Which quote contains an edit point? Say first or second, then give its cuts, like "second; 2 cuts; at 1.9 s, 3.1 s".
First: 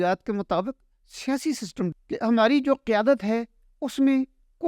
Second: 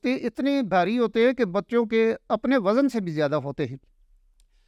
first; 1 cut; at 1.9 s